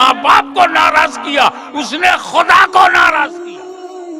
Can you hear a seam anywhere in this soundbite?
yes; 1 cut; at 3.3 s

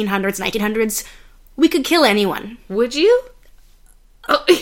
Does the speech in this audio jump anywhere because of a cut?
no; 0 cuts

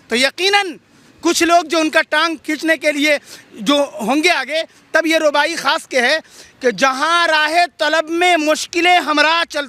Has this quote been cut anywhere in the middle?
no; 0 cuts

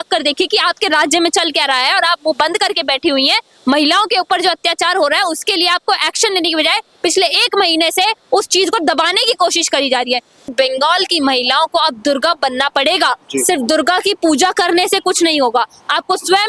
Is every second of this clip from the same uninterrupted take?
no; 1 cut; at 10.5 s

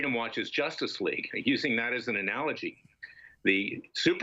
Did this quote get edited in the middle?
no; 0 cuts

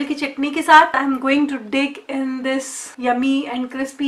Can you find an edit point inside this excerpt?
yes; 2 cuts; at 0.9 s, 2.8 s

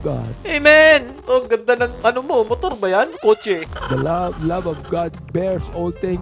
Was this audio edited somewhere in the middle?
yes; 2 cuts; at 1.2 s, 3.7 s

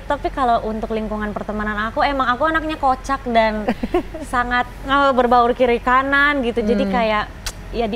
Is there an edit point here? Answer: no; 0 cuts

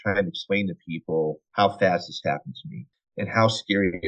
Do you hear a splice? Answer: yes; 2 cuts; at 1.4 s, 2.8 s

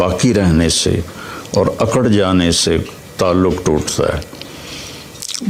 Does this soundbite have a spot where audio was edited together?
no; 0 cuts

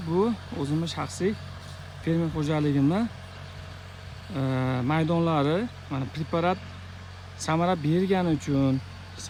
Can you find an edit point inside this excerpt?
no; 0 cuts

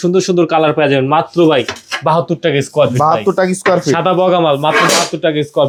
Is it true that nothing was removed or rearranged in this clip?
yes; 0 cuts

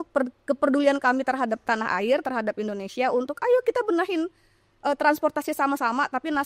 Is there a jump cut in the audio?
no; 0 cuts

